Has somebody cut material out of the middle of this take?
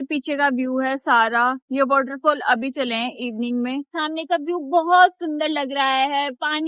yes; 1 cut; at 3.9 s

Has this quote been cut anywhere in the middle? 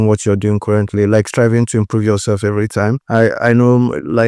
yes; 1 cut; at 3.0 s

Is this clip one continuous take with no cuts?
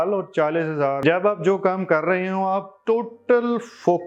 no; 1 cut; at 1.0 s

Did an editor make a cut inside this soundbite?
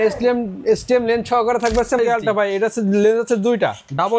yes; 1 cut; at 2.0 s

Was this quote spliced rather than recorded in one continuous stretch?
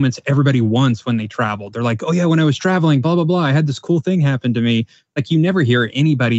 no; 0 cuts

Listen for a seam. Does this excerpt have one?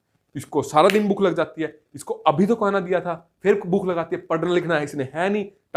no; 0 cuts

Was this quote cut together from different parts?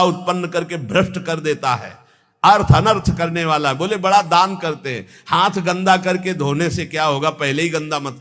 no; 0 cuts

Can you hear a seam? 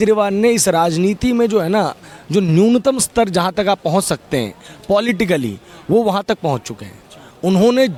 no; 0 cuts

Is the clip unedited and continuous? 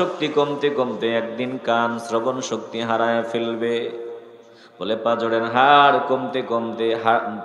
yes; 0 cuts

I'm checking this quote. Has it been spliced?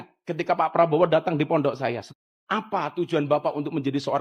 yes; 1 cut; at 2.1 s

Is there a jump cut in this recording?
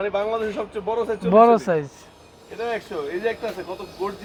no; 0 cuts

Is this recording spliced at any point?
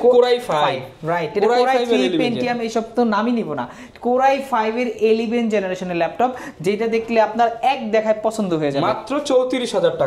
no; 0 cuts

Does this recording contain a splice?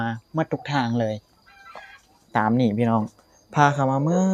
no; 0 cuts

